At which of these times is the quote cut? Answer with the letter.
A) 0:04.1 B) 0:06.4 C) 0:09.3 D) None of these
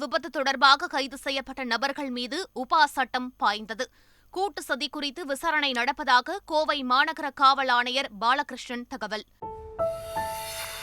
C